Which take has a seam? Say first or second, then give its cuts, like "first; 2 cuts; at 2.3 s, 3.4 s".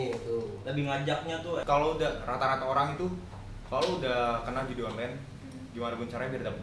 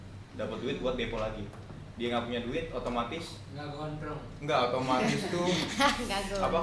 first; 1 cut; at 1.6 s